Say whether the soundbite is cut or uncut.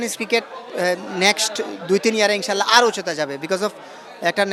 uncut